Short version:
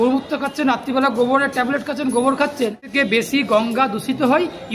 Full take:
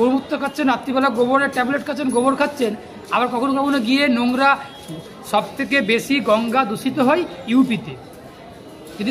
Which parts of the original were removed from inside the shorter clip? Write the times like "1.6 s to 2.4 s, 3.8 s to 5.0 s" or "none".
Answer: 2.8 s to 5.6 s